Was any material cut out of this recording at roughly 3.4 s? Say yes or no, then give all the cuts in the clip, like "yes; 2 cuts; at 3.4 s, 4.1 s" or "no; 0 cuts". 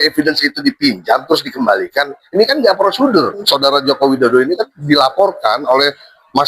yes; 1 cut; at 3.4 s